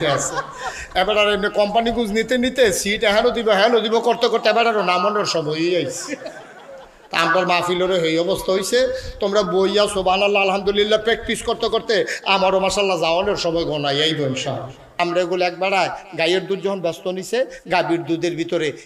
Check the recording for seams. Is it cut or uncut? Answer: cut